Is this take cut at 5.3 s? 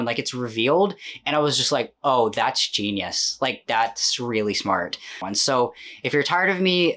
yes; 1 cut; at 5.3 s

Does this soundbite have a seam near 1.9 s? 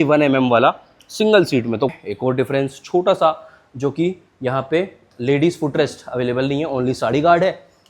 yes; 1 cut; at 1.9 s

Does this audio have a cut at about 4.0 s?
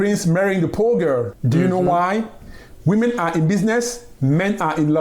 no; 1 cut; at 1.4 s

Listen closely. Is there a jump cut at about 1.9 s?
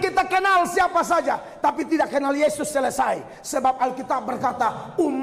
no; 0 cuts

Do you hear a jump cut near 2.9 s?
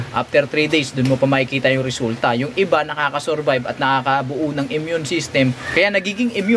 no; 1 cut; at 5.6 s

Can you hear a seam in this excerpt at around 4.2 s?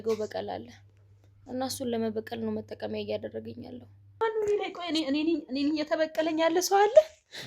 yes; 1 cut; at 4.2 s

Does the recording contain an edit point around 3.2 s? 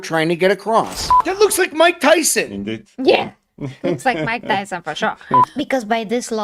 no; 2 cuts; at 1.0 s, 5.5 s

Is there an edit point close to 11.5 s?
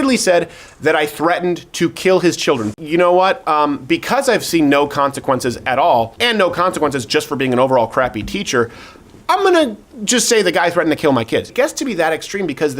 yes; 3 cuts; at 2.7 s, 6.1 s, 11.5 s

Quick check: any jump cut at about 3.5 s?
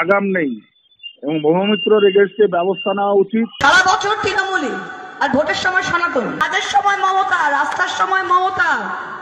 yes; 2 cuts; at 3.5 s, 6.4 s

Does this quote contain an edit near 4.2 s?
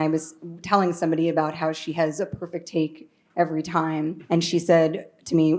yes; 1 cut; at 4.2 s

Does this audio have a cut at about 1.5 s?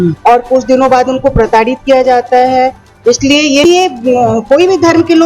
no; 1 cut; at 3.6 s

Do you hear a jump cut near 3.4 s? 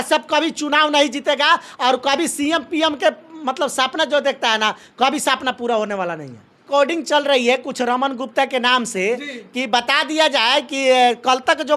no; 1 cut; at 6.6 s

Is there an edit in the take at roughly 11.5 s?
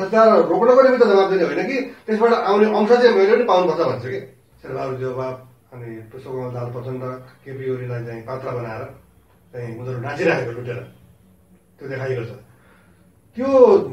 no; 1 cut; at 4.5 s

